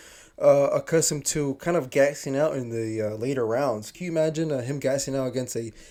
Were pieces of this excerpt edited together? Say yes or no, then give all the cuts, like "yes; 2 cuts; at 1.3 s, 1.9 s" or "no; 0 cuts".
no; 0 cuts